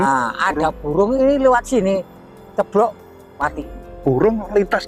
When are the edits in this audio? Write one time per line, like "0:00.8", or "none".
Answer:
none